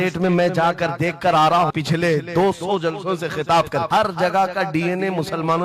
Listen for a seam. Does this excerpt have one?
yes; 2 cuts; at 1.7 s, 3.9 s

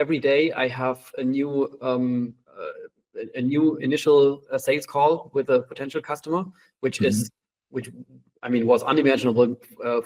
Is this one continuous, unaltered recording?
yes; 0 cuts

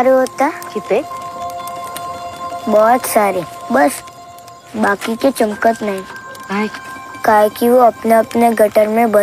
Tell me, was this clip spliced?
no; 0 cuts

